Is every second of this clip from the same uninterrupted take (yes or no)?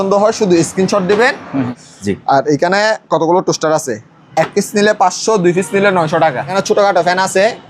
no